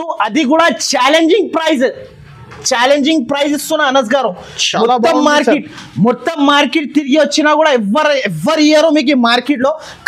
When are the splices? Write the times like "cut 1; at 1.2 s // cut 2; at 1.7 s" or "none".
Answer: none